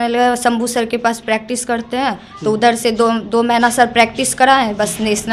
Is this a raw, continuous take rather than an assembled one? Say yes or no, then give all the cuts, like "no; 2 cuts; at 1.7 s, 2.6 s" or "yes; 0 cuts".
yes; 0 cuts